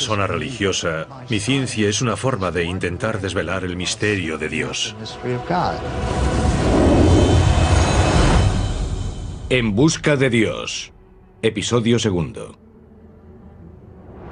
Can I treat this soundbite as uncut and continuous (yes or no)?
yes